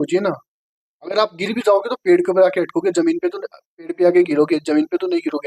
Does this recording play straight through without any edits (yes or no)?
yes